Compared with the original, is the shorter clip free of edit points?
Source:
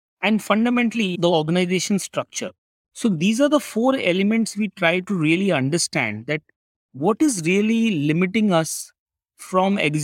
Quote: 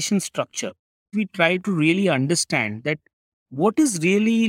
no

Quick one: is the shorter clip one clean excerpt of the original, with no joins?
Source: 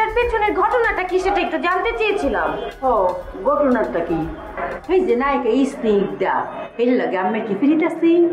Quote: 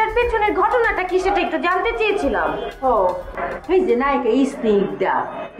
no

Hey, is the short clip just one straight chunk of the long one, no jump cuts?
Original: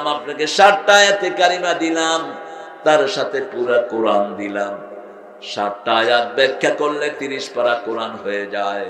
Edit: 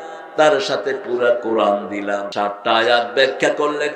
no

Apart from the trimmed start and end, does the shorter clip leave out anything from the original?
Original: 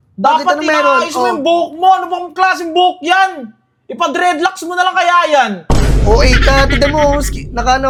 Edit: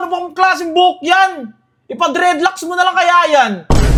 no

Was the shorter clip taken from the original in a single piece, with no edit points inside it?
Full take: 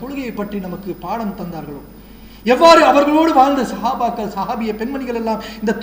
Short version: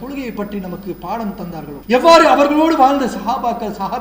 no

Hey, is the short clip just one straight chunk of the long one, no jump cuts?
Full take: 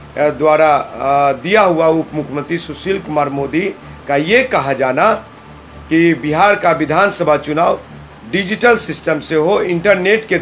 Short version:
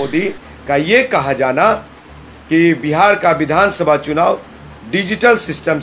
yes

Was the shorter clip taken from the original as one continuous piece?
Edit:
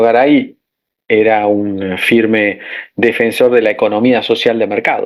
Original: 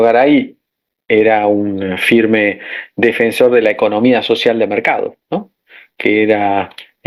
yes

